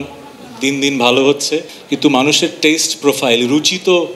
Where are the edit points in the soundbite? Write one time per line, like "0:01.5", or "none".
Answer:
0:01.7